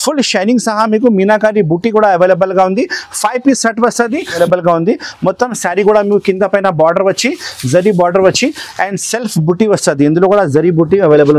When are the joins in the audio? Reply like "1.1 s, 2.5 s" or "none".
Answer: 4.4 s